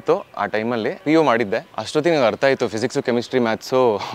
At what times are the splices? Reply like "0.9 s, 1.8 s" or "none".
1.0 s, 1.8 s